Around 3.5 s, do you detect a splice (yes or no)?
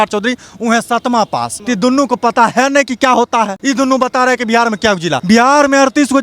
yes